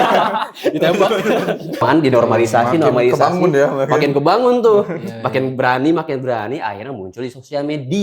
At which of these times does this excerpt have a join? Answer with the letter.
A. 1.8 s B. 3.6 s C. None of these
A